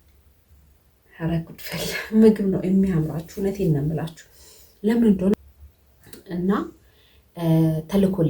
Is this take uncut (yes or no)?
no